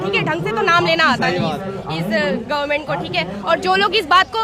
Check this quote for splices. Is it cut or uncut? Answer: uncut